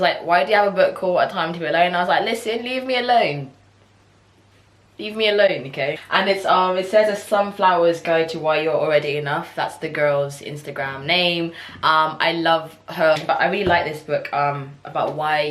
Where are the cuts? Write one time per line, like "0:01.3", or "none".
none